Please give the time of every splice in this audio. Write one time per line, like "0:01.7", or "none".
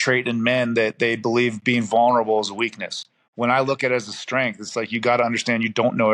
none